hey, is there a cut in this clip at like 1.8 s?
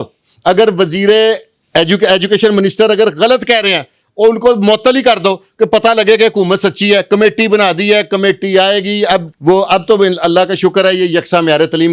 no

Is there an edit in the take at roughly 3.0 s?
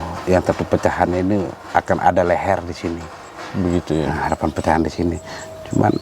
no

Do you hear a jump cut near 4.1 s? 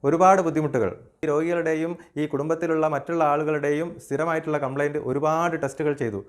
no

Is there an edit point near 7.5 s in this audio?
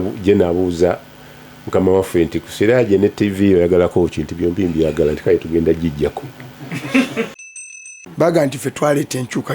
yes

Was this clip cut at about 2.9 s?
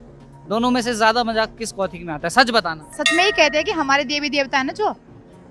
yes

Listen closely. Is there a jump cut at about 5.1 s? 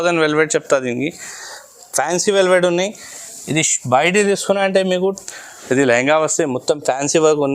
yes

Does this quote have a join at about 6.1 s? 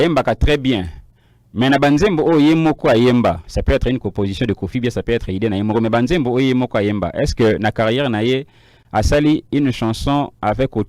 no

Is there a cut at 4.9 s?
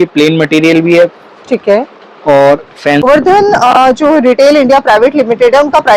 no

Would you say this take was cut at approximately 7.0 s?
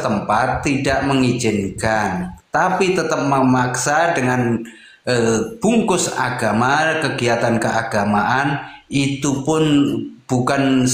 no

